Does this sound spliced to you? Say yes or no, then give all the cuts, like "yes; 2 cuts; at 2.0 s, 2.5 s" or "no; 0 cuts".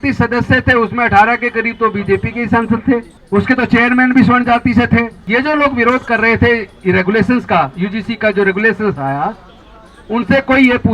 yes; 2 cuts; at 3.1 s, 5.2 s